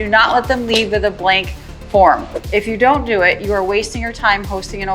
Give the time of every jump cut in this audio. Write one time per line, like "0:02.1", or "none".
0:02.4